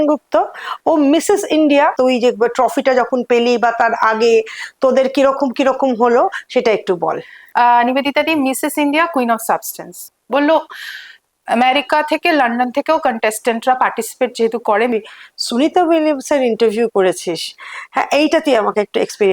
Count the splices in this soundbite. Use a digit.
3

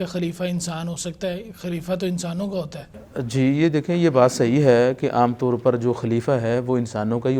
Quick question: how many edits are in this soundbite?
0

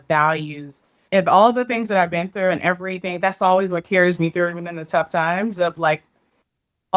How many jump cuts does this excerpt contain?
1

